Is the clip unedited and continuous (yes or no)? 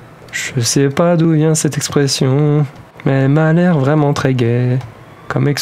no